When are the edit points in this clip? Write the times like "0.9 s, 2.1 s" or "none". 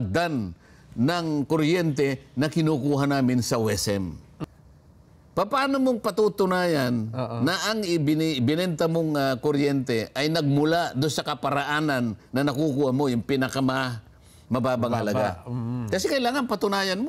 4.4 s